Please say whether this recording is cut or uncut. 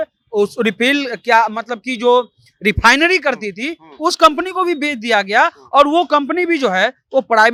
uncut